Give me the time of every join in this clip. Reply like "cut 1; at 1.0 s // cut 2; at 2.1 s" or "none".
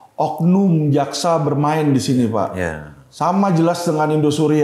none